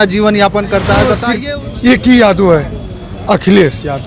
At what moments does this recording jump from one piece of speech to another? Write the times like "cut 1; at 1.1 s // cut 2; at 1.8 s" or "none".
cut 1; at 1.3 s